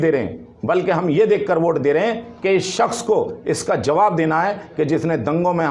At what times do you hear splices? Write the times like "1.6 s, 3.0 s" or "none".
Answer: none